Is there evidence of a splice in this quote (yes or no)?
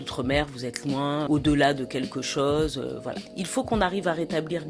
no